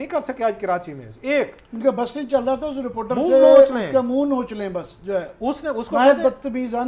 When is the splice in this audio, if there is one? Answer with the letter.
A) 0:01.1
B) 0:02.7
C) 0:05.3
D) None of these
D